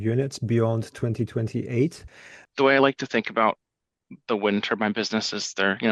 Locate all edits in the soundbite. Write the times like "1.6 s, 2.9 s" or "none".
2.5 s